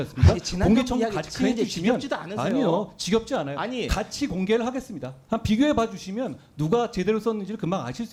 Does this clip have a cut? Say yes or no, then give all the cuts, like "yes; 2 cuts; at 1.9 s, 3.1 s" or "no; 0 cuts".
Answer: no; 0 cuts